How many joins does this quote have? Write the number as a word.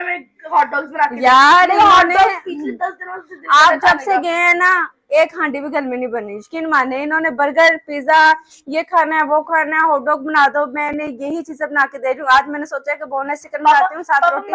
zero